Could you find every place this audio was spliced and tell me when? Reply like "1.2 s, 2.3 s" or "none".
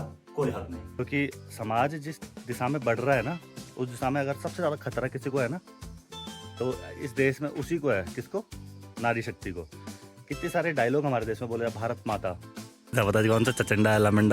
1.0 s, 12.9 s